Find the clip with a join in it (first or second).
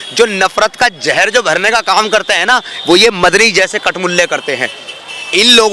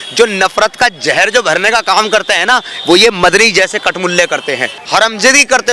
second